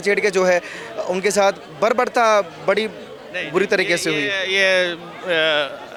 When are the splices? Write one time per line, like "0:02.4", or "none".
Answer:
none